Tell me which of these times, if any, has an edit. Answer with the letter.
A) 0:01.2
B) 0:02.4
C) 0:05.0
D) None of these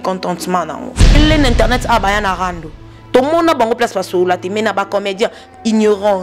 A